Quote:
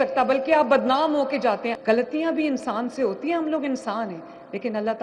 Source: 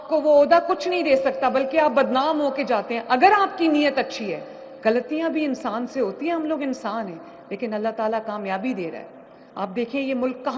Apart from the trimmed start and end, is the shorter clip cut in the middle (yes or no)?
yes